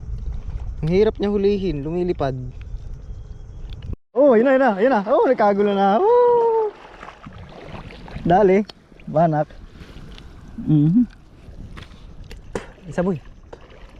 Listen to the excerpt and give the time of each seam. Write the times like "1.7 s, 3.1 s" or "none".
3.9 s